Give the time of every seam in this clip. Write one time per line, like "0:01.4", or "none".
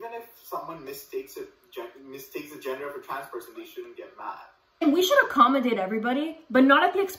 0:04.8

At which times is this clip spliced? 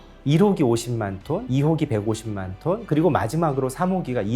0:01.5

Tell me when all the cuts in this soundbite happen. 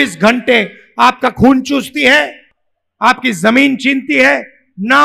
none

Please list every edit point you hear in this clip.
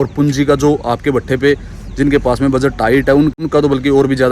0:03.4

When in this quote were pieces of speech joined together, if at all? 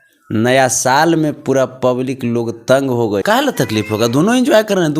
0:03.2

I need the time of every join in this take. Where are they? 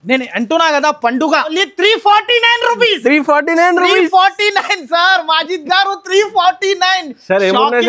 0:01.5

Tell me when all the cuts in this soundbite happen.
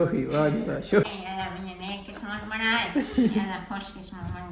0:01.1

